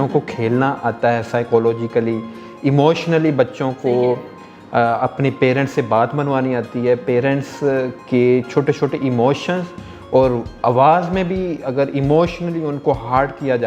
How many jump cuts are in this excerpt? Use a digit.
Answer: 0